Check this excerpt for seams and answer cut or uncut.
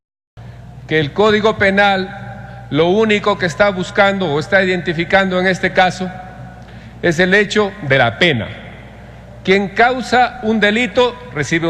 cut